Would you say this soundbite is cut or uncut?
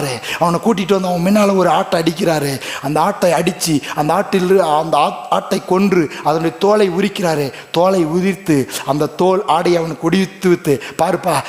uncut